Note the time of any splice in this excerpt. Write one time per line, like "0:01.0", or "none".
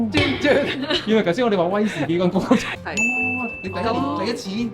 0:02.7